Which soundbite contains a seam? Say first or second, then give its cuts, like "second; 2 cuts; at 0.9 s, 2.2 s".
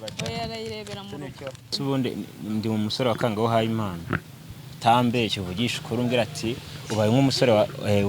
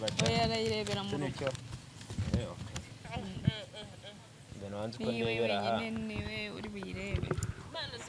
first; 1 cut; at 1.7 s